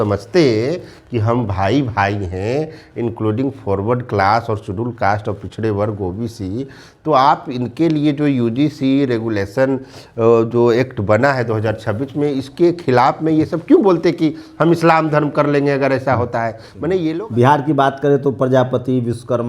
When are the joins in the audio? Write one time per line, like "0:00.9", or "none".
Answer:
0:17.1